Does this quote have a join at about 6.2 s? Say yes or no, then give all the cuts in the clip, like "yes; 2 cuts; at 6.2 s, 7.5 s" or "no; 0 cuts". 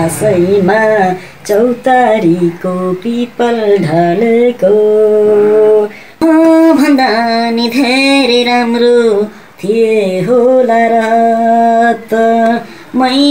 yes; 1 cut; at 6.2 s